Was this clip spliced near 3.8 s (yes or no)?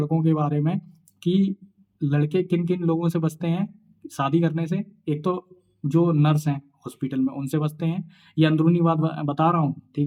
no